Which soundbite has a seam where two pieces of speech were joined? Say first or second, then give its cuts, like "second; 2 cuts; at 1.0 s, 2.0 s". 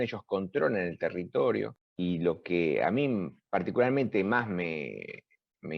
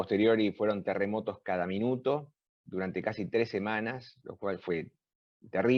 first; 1 cut; at 1.8 s